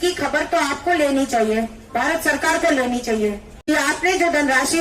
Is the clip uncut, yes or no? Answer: no